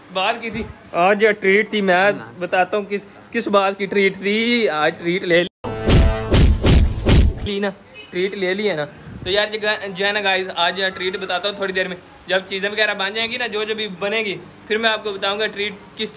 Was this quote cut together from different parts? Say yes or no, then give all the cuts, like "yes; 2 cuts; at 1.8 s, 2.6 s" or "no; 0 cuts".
no; 0 cuts